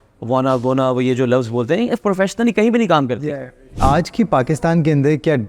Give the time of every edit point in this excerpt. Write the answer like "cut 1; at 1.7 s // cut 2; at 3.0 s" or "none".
cut 1; at 3.8 s